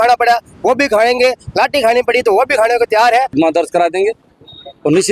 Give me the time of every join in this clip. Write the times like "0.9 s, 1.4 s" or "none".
3.3 s